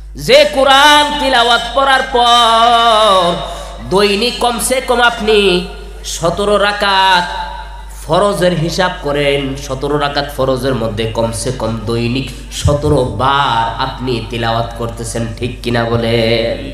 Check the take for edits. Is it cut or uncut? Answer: uncut